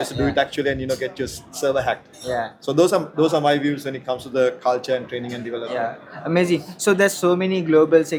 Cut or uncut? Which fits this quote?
uncut